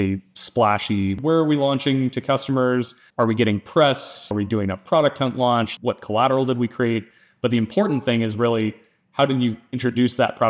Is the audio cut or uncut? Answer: cut